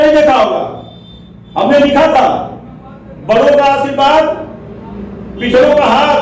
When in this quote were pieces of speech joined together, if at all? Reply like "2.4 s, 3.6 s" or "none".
none